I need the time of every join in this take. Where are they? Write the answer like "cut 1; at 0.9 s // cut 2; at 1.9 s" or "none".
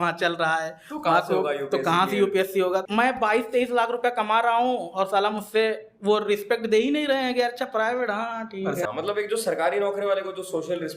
cut 1; at 2.8 s // cut 2; at 8.8 s